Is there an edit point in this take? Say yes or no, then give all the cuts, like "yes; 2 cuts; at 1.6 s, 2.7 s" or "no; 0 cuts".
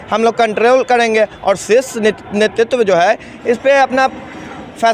no; 0 cuts